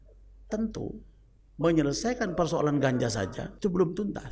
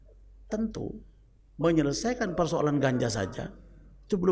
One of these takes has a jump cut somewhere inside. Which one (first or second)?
first